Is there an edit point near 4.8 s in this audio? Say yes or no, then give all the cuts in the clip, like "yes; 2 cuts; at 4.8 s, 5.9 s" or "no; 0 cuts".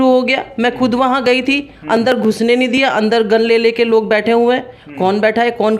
no; 0 cuts